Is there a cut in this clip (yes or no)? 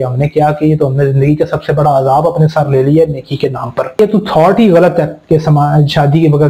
yes